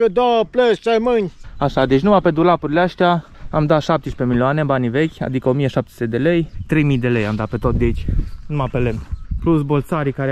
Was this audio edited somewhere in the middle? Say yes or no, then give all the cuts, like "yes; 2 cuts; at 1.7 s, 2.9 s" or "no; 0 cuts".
yes; 3 cuts; at 1.5 s, 6.6 s, 9.2 s